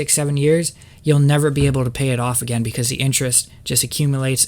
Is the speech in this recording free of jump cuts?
yes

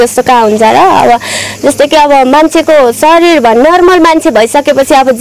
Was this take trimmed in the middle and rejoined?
no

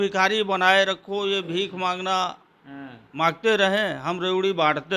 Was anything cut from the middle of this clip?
no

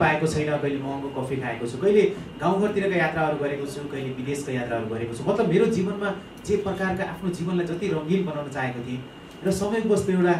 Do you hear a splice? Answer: no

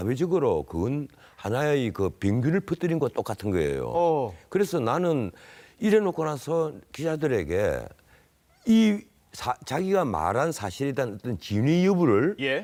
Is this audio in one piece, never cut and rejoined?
yes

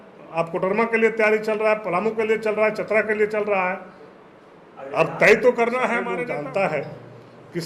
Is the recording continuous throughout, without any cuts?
no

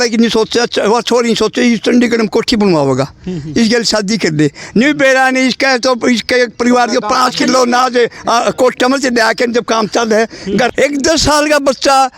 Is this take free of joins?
no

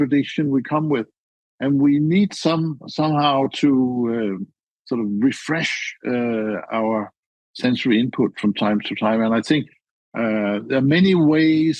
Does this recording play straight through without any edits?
no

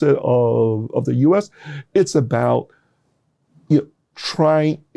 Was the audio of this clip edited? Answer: no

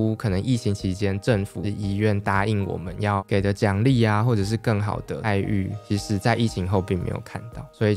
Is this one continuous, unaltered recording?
no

